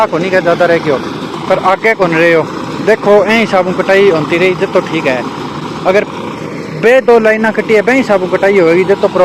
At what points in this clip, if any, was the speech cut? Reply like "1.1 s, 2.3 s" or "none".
none